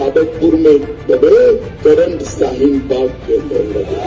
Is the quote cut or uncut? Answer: cut